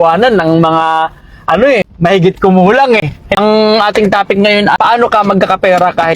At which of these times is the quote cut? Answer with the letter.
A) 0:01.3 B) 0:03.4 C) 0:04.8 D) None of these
B